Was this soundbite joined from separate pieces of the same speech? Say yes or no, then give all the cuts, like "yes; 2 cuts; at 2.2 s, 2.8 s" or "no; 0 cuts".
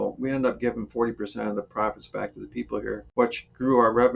yes; 1 cut; at 3.1 s